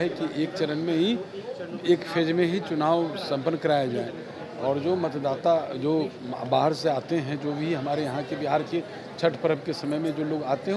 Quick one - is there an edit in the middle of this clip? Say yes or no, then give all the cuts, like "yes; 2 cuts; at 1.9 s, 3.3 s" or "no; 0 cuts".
no; 0 cuts